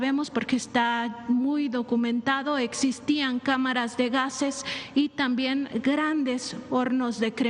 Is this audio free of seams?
yes; 0 cuts

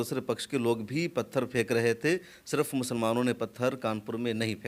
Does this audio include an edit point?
no; 0 cuts

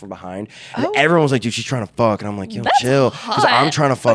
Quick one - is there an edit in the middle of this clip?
no; 0 cuts

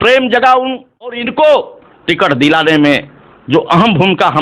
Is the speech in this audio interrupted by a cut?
yes; 1 cut; at 1.3 s

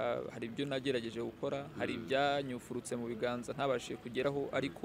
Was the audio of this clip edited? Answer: no; 0 cuts

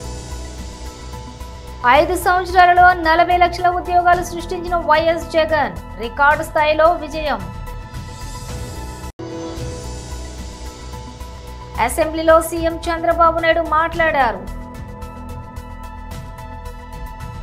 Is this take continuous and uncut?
no; 2 cuts; at 1.0 s, 1.7 s

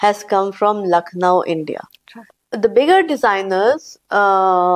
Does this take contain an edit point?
yes; 1 cut; at 2.4 s

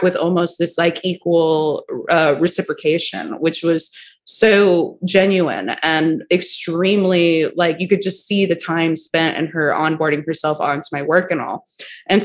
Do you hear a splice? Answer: no; 0 cuts

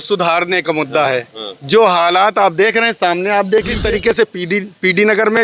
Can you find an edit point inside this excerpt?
yes; 1 cut; at 3.8 s

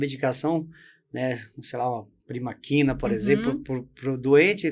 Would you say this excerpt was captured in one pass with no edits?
yes; 0 cuts

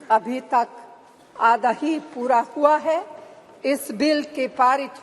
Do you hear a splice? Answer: no; 0 cuts

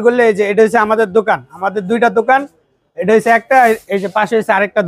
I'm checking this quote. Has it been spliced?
no; 0 cuts

